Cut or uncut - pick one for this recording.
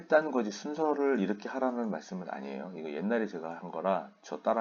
uncut